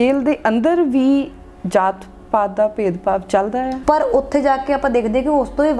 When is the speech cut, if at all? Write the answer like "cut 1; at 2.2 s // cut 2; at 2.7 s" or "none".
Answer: cut 1; at 3.8 s